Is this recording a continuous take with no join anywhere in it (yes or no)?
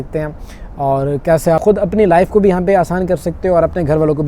yes